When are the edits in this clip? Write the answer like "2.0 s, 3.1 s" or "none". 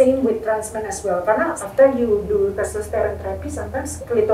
1.6 s